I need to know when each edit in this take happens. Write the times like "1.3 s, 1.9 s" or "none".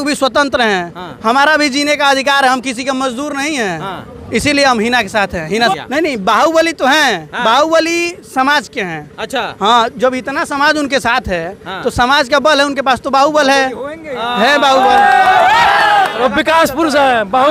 5.5 s, 16.2 s